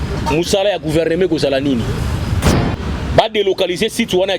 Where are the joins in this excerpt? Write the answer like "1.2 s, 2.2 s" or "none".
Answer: 2.4 s